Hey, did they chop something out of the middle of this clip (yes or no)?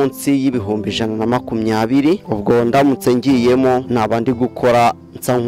yes